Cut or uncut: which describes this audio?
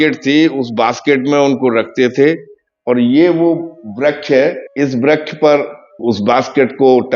cut